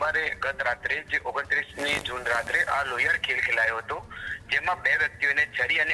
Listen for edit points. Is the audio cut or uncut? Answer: uncut